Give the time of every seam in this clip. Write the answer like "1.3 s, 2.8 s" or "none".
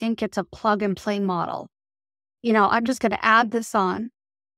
none